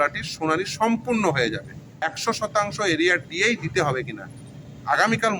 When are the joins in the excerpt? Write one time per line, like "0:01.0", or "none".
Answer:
0:02.0

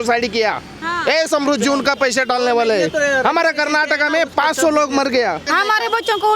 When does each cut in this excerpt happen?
0:05.5

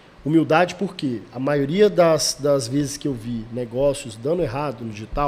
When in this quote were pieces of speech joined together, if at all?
none

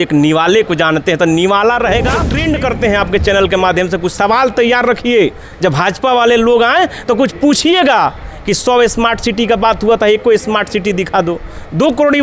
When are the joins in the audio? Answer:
0:02.3

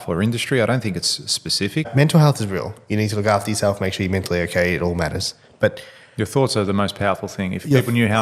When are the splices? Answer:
0:01.9

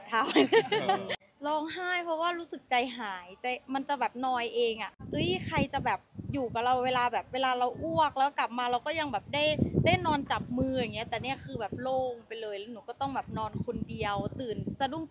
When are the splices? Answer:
0:01.1
0:04.9

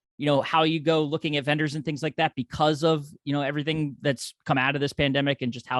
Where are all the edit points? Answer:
none

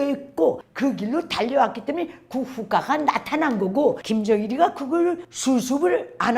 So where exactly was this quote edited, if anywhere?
0:04.0

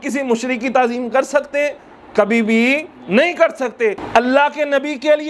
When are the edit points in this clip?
0:04.0

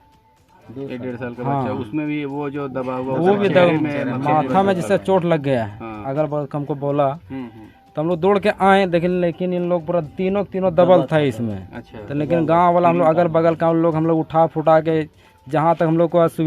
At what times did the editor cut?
0:06.0

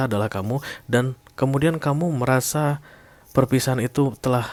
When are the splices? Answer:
none

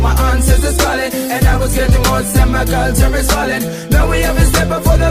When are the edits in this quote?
0:03.2

